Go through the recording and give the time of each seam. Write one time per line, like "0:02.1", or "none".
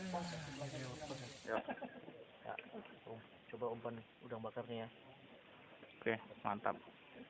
0:01.3